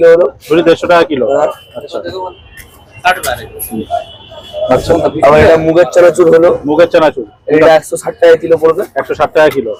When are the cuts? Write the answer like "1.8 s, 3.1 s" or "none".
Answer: none